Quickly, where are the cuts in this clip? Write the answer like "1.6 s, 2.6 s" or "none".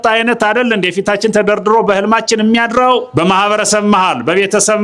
3.1 s